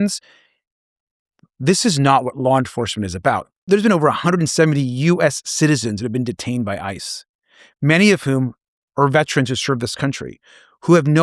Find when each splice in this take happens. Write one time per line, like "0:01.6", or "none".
0:03.7